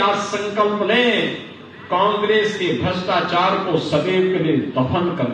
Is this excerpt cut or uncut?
uncut